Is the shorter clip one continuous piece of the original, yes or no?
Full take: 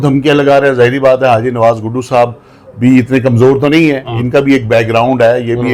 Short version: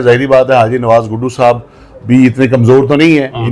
yes